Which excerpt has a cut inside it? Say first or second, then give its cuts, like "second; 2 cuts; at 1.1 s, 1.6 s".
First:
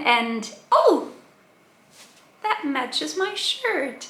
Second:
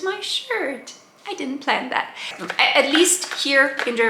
second; 1 cut; at 2.3 s